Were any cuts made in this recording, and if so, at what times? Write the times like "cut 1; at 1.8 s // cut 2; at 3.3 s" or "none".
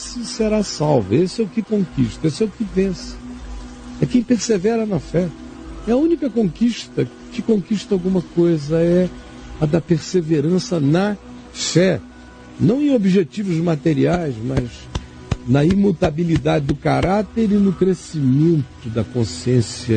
cut 1; at 9.1 s